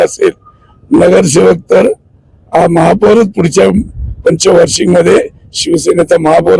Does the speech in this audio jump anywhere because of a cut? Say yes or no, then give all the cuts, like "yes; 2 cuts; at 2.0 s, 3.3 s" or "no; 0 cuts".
no; 0 cuts